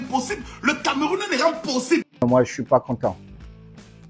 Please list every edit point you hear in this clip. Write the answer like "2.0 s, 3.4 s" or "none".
2.1 s